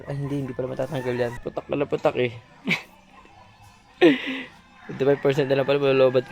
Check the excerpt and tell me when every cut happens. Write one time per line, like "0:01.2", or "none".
0:01.4

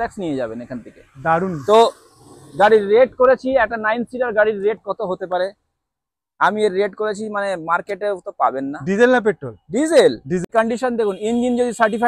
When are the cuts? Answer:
0:10.4

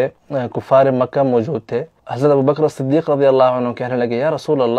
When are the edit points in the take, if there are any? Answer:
0:02.0

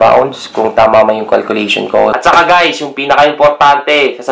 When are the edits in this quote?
0:02.1

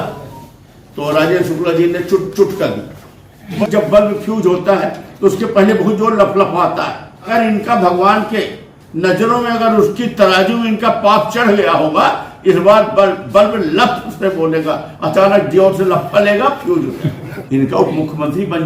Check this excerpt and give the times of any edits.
0:03.6
0:07.3
0:17.3

